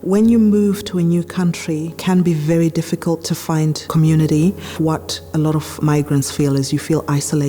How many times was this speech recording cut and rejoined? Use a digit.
2